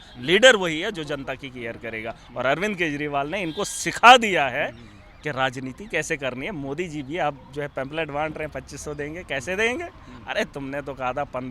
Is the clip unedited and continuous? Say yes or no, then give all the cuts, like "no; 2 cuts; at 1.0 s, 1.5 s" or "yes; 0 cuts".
yes; 0 cuts